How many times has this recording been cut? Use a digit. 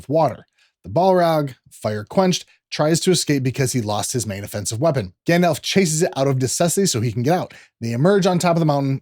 1